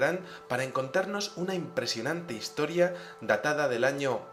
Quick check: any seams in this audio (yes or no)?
no